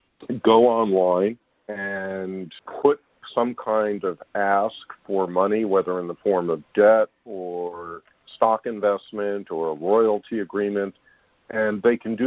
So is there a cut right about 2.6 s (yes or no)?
yes